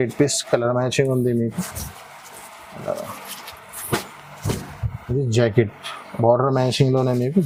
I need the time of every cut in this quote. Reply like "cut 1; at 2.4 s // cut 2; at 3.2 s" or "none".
none